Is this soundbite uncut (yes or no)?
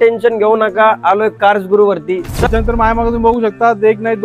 no